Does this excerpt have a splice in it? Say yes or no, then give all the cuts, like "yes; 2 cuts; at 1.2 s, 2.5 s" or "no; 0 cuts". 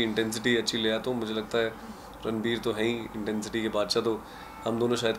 no; 0 cuts